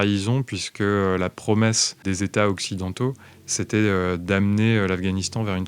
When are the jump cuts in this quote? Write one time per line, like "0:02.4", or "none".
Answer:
0:02.0